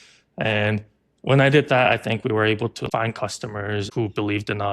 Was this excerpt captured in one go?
no; 2 cuts; at 2.8 s, 3.9 s

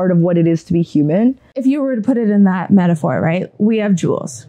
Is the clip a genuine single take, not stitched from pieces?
no; 1 cut; at 1.6 s

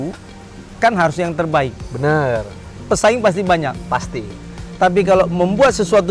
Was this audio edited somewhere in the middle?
no; 0 cuts

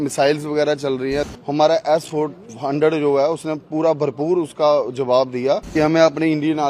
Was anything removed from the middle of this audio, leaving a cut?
yes; 2 cuts; at 1.3 s, 5.7 s

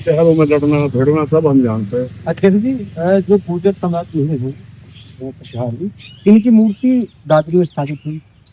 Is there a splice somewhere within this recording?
no; 0 cuts

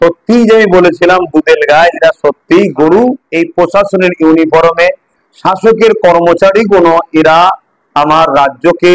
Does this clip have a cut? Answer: yes; 1 cut; at 3.2 s

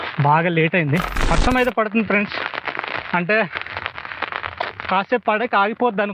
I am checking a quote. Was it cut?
yes; 1 cut; at 1.3 s

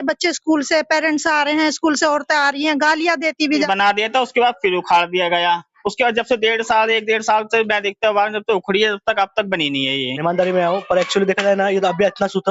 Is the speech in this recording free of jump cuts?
no; 2 cuts; at 3.5 s, 10.1 s

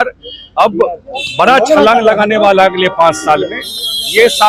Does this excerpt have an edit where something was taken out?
no; 0 cuts

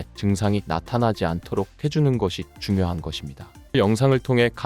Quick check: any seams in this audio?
yes; 1 cut; at 3.7 s

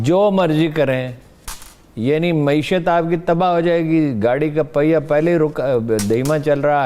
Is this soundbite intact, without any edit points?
yes; 0 cuts

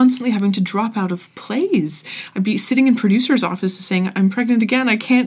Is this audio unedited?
yes; 0 cuts

